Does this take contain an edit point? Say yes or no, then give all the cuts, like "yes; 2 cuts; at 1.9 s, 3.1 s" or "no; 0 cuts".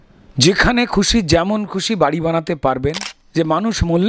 yes; 1 cut; at 3.1 s